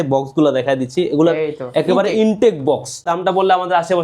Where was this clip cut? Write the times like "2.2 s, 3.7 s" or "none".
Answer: 3.1 s